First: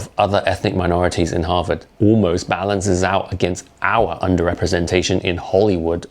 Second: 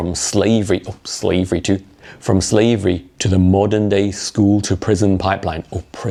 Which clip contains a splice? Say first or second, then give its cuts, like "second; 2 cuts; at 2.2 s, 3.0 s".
first; 1 cut; at 1.9 s